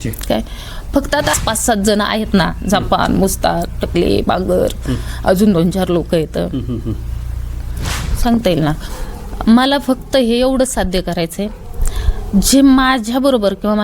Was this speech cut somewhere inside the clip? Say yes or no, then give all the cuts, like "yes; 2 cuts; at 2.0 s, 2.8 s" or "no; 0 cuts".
yes; 2 cuts; at 1.3 s, 8.1 s